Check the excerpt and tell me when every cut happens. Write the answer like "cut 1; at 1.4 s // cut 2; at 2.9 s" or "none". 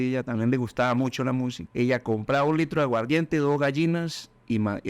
cut 1; at 1.6 s